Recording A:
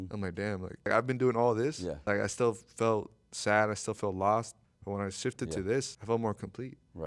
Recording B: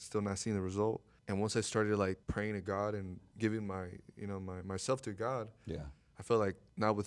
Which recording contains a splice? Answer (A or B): A